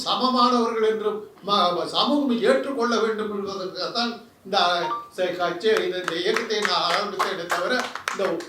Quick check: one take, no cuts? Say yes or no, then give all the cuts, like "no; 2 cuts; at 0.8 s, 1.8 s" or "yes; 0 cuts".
yes; 0 cuts